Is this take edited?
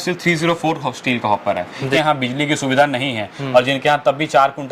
yes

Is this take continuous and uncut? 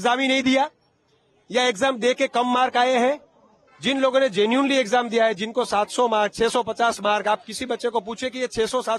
yes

